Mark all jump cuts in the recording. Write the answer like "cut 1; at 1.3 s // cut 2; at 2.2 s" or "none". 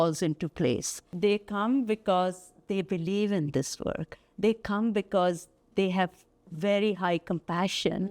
cut 1; at 1.1 s